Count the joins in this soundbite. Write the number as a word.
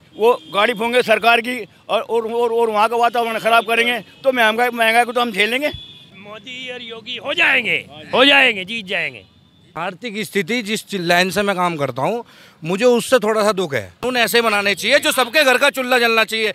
three